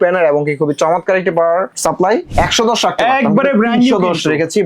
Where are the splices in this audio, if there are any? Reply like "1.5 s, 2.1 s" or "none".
2.1 s